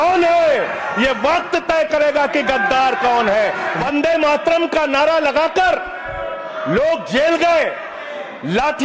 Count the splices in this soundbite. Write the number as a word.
one